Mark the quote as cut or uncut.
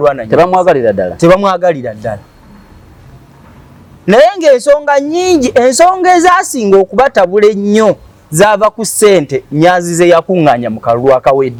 uncut